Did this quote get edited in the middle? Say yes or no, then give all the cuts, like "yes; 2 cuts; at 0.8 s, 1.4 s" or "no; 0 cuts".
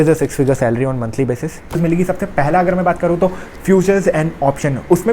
yes; 1 cut; at 1.8 s